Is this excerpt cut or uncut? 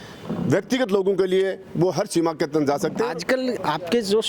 cut